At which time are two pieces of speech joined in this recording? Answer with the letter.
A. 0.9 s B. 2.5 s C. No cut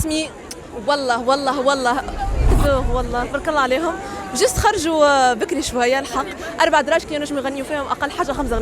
B